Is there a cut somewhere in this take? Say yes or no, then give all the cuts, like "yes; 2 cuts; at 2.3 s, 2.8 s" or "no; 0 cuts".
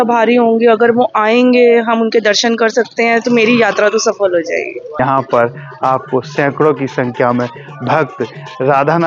yes; 1 cut; at 5.0 s